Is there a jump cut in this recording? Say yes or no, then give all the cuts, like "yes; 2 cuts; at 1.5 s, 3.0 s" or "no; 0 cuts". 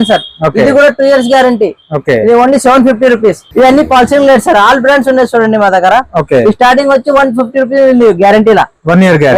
yes; 1 cut; at 3.4 s